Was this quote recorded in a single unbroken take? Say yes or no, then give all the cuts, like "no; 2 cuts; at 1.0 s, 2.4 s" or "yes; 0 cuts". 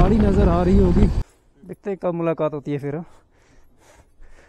no; 1 cut; at 1.2 s